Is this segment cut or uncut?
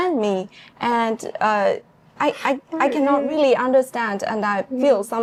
uncut